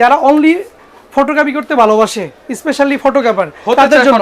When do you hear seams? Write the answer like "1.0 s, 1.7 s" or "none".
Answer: none